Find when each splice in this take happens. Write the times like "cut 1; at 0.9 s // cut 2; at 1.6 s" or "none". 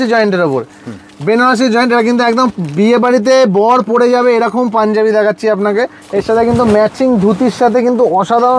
none